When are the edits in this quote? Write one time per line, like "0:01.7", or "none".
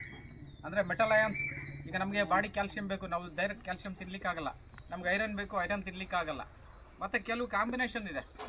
none